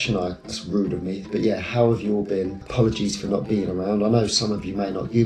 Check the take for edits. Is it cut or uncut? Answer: uncut